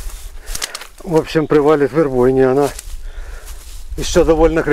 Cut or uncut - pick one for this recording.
uncut